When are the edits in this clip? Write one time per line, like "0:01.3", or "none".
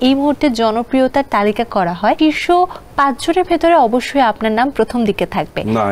0:02.2